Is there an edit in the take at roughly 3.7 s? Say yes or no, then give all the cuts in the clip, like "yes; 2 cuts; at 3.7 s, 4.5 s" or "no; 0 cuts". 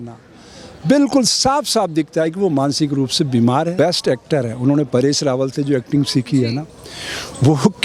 yes; 1 cut; at 3.7 s